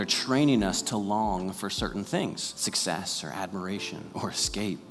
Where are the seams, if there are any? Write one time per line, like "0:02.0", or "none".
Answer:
0:02.5